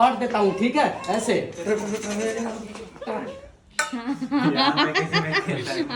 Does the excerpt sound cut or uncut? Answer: cut